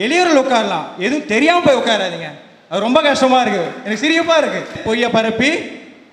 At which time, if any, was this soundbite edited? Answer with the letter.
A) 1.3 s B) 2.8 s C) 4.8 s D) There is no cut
C